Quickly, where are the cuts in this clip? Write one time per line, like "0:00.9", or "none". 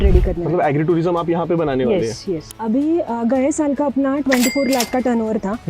0:02.4